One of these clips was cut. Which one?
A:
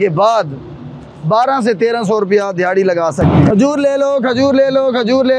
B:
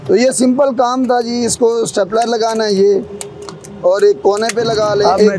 A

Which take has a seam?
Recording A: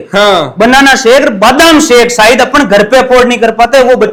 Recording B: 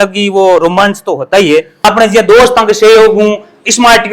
B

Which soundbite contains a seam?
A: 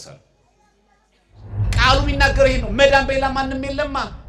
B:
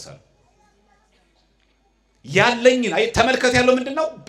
A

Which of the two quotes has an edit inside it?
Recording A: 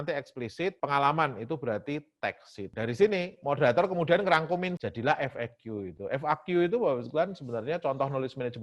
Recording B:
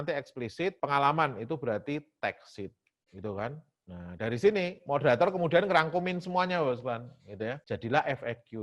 A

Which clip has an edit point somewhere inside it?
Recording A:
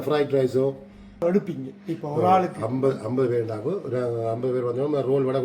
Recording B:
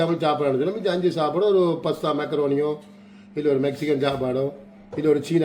A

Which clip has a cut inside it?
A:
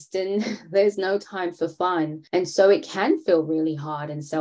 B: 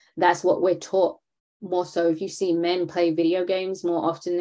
A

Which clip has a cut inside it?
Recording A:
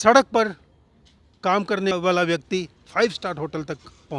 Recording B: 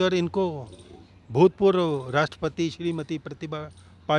A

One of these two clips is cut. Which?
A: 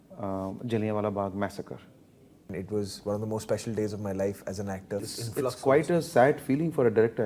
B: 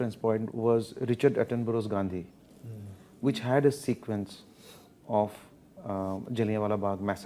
A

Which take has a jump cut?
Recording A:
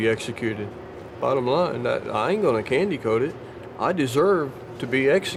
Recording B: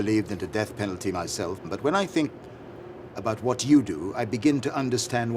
B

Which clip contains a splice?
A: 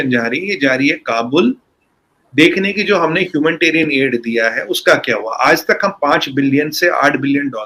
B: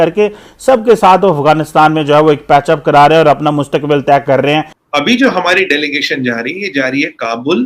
B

